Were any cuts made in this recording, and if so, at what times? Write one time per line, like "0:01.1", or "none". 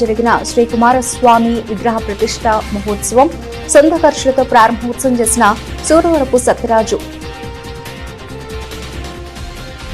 0:07.7
0:09.2